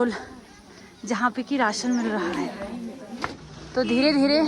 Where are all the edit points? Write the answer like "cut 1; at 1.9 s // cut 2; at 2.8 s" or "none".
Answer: cut 1; at 3.4 s

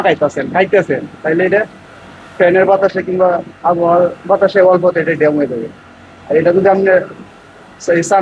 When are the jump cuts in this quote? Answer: none

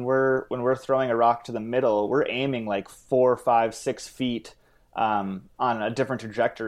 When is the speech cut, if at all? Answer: none

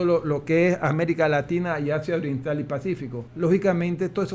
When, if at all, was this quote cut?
cut 1; at 3.2 s

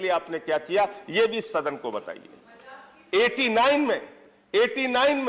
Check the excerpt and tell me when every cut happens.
none

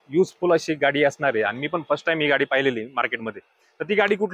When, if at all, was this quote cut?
none

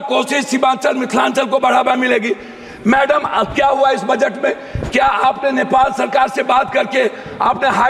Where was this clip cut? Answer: none

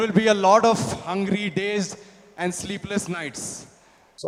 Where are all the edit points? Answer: none

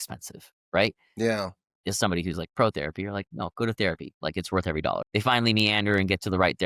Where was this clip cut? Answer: cut 1; at 5.0 s

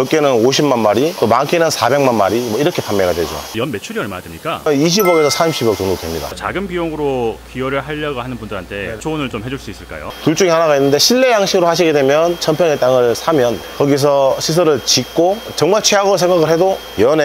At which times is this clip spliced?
cut 1; at 3.5 s // cut 2; at 4.7 s // cut 3; at 6.3 s // cut 4; at 10.0 s // cut 5; at 15.5 s

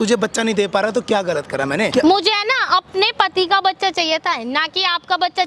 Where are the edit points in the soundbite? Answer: cut 1; at 1.9 s

